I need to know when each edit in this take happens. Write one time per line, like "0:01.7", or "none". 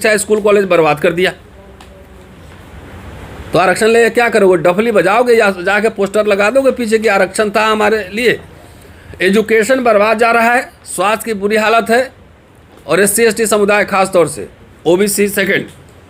none